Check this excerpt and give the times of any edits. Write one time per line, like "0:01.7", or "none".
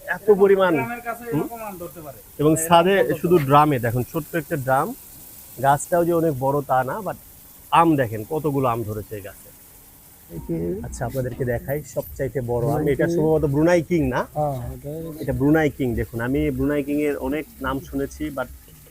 0:10.4